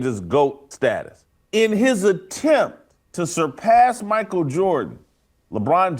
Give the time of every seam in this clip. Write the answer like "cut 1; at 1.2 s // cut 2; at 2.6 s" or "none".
cut 1; at 1.0 s